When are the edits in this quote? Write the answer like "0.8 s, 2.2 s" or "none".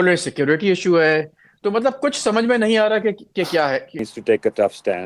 4.1 s